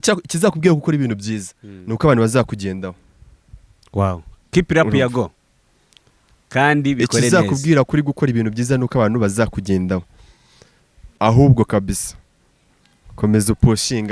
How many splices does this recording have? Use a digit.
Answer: 1